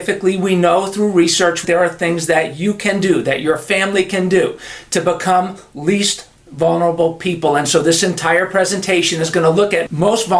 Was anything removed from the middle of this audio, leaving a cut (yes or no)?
yes